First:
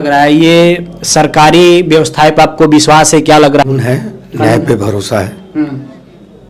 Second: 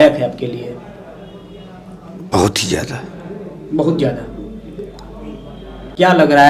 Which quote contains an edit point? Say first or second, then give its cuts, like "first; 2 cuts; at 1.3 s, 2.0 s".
first; 1 cut; at 3.6 s